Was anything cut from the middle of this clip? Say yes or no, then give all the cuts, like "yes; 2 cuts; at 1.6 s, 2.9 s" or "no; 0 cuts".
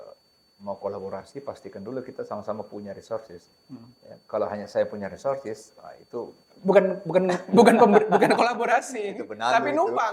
no; 0 cuts